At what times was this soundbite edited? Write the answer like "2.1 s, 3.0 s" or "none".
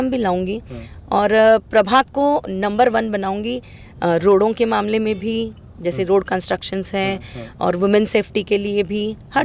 none